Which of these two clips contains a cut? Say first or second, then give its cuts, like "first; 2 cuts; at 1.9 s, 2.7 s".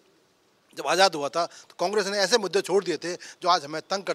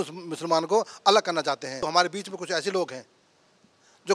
second; 1 cut; at 1.8 s